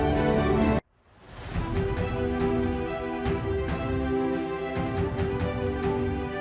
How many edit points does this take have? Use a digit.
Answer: 0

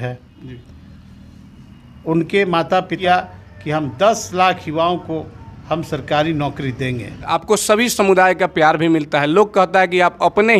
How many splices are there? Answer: 2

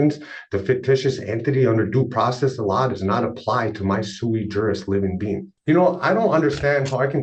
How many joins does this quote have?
1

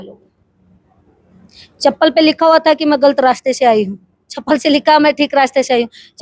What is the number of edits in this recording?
0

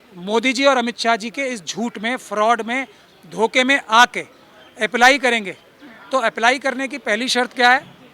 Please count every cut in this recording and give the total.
0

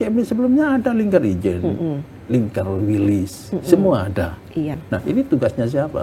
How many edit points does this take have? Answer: 1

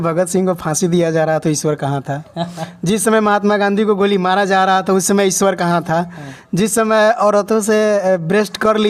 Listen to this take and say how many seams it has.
0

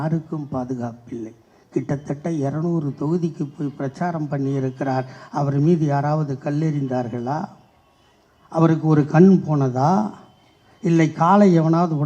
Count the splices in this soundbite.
0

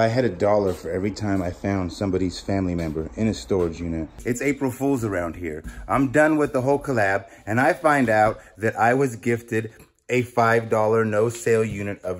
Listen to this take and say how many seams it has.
1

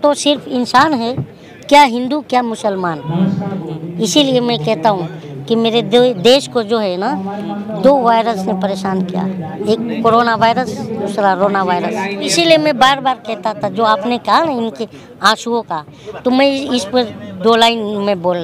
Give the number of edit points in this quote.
3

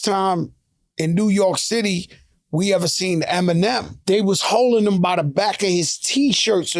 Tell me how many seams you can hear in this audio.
1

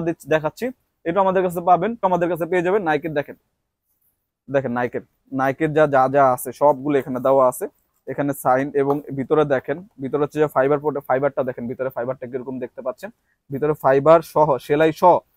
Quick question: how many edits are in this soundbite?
1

